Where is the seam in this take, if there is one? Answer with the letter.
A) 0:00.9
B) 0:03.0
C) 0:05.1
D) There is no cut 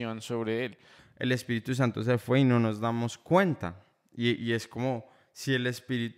A